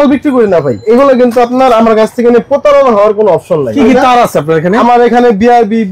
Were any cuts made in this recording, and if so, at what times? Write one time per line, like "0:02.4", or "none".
0:00.8
0:03.7